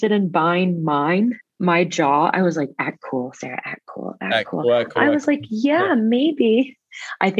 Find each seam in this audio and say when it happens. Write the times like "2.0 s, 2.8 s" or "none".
1.5 s